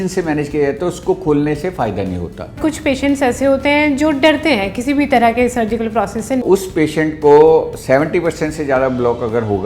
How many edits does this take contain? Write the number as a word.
two